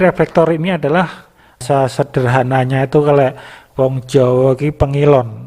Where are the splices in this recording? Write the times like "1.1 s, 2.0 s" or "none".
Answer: 1.5 s